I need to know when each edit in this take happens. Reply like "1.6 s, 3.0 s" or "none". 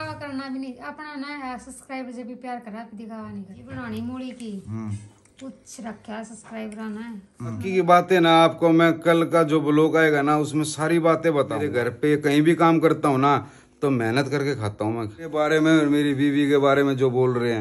3.7 s, 7.6 s, 11.7 s, 15.3 s